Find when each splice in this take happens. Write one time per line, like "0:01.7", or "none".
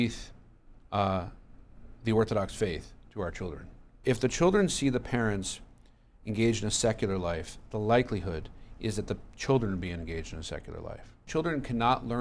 0:04.0
0:11.2